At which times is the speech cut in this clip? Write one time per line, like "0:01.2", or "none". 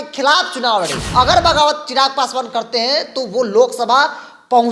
0:01.0